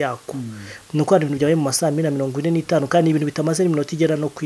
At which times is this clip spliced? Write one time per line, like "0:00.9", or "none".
none